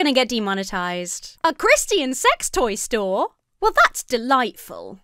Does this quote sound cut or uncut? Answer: uncut